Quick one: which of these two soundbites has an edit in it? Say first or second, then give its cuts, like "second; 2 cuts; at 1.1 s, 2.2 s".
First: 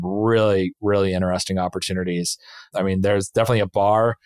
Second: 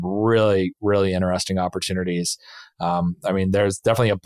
first; 1 cut; at 2.7 s